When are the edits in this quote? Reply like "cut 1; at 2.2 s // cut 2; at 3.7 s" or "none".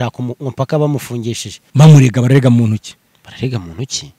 cut 1; at 1.5 s